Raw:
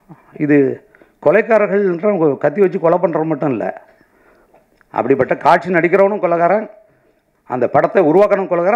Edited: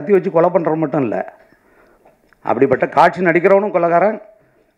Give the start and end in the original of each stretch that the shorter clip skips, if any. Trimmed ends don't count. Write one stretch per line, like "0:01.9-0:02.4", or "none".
none